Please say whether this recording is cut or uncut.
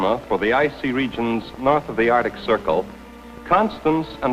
cut